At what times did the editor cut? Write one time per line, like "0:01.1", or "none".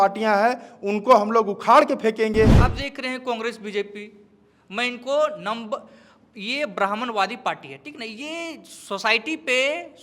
0:02.6

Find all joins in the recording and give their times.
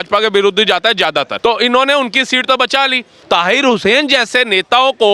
0:01.3
0:03.1

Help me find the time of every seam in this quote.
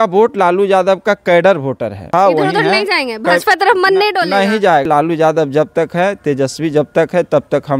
0:02.1
0:04.9

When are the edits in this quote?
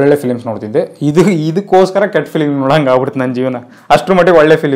none

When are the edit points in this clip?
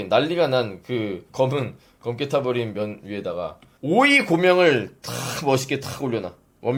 none

